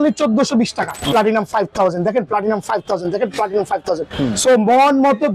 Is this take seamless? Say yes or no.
no